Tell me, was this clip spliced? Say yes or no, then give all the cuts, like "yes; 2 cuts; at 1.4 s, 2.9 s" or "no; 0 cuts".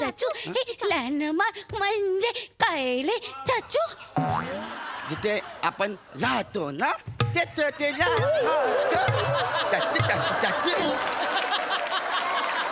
no; 0 cuts